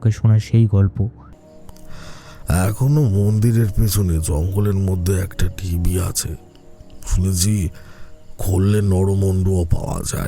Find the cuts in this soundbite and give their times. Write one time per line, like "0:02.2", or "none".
0:01.3